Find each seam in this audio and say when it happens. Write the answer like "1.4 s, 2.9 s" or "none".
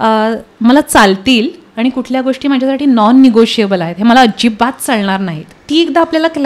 5.6 s